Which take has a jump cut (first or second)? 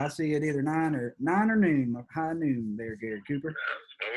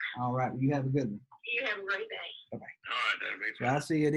second